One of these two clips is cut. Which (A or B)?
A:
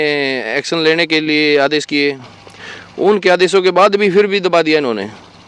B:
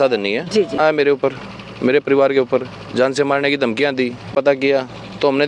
B